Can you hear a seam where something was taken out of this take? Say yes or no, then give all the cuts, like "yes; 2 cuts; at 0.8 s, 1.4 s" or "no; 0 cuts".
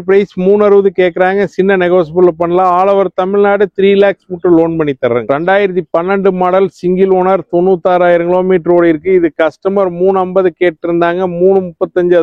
yes; 1 cut; at 5.2 s